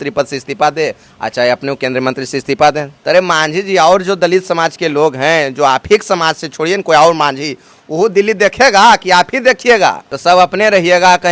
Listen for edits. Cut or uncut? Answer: cut